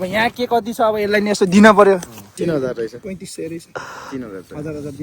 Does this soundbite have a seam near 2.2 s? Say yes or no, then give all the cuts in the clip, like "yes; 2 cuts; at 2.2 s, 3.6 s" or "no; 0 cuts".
yes; 1 cut; at 2.2 s